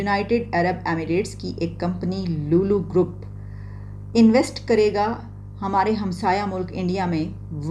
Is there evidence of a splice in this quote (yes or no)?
no